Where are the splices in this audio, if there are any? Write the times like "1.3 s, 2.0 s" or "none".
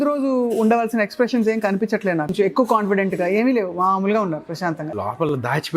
2.3 s, 4.6 s